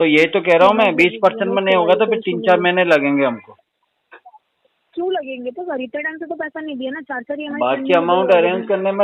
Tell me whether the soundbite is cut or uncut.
uncut